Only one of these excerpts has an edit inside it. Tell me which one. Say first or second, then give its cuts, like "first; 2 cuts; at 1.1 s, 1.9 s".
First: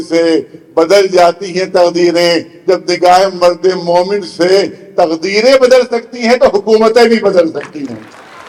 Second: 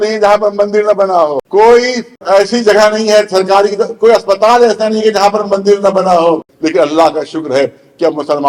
second; 3 cuts; at 1.4 s, 2.2 s, 6.5 s